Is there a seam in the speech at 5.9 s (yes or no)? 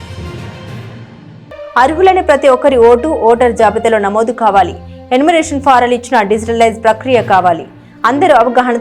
no